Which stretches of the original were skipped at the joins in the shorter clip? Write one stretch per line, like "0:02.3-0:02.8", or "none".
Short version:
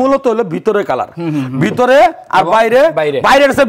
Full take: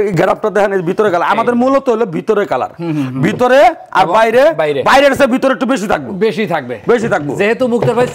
none